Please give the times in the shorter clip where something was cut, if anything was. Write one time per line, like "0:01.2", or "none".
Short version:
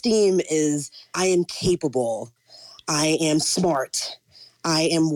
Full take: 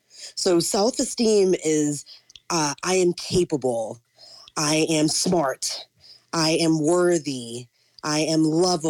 0:01.1